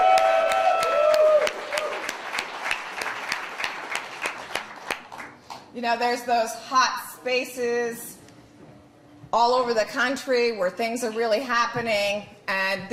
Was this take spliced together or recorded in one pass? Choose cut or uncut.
uncut